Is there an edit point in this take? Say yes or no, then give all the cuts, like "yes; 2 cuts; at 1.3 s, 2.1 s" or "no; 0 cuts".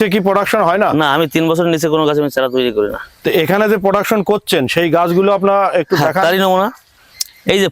no; 0 cuts